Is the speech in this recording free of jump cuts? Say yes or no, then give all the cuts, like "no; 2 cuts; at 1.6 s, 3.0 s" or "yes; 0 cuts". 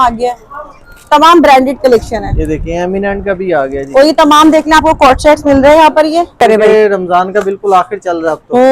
no; 1 cut; at 6.3 s